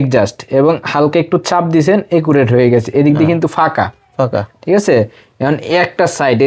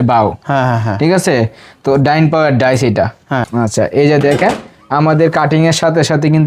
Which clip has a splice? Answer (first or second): second